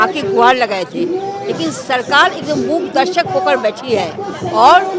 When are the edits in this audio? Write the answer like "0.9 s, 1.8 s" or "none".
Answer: none